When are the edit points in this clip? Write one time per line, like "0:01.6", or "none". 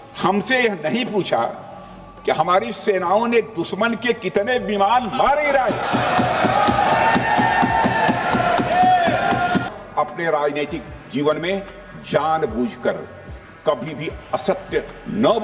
0:09.7